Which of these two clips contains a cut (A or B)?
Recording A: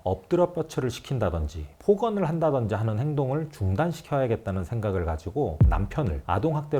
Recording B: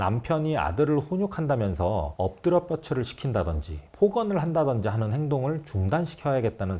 A